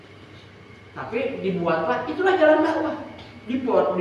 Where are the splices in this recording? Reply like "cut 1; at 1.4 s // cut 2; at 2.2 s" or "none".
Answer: none